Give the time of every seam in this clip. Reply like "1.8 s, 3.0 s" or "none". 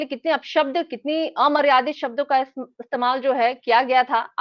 none